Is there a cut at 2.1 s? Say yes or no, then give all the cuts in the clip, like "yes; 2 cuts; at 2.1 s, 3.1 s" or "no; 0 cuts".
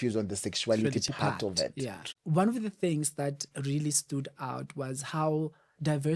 yes; 1 cut; at 2.1 s